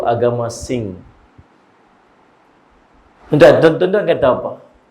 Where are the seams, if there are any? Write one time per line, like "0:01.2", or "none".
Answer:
none